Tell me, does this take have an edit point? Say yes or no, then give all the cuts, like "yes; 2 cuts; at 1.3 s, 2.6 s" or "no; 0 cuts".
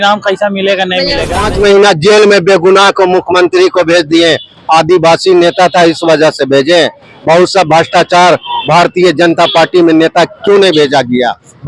yes; 1 cut; at 1.4 s